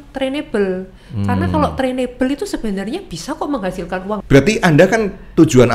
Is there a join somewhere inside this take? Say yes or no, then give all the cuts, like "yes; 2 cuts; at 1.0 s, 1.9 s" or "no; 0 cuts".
yes; 1 cut; at 4.2 s